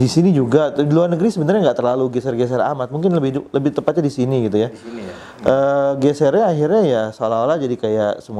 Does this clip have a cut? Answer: no; 0 cuts

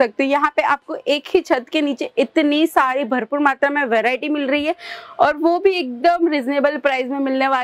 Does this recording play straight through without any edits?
yes; 0 cuts

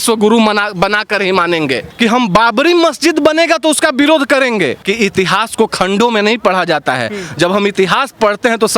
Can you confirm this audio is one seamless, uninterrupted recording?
no; 2 cuts; at 1.8 s, 4.9 s

